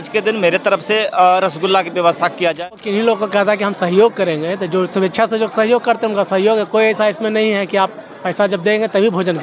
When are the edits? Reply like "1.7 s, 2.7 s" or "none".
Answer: 2.7 s

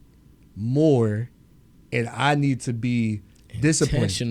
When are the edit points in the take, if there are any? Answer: none

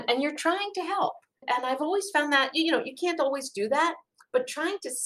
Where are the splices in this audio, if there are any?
1.3 s

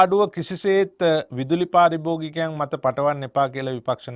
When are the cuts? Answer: none

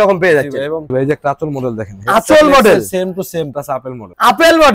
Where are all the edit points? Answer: 0.9 s, 3.6 s

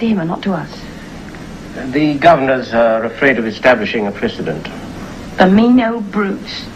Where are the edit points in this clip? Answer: 4.3 s

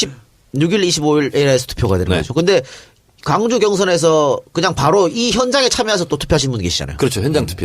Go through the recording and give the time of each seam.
1.1 s

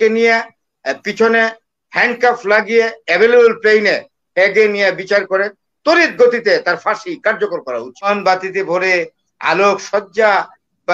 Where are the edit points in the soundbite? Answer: 8.1 s

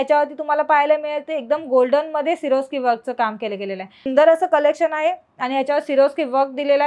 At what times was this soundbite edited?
4.1 s

